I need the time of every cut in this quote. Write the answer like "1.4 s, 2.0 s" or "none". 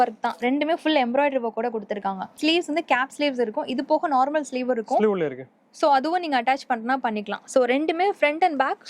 2.3 s